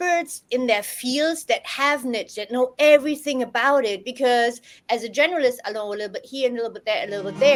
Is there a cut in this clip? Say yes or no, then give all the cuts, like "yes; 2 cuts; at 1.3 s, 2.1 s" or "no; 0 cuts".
no; 0 cuts